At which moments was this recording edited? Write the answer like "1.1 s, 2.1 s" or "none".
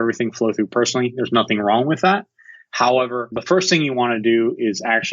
3.3 s